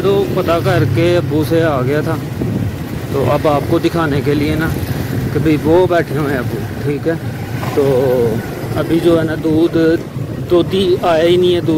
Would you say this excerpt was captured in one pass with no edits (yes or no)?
yes